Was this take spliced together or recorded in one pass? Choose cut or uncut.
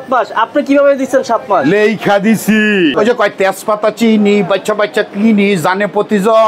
cut